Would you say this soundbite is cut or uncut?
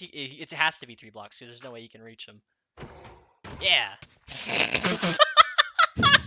uncut